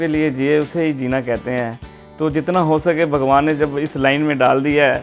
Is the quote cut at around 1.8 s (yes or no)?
no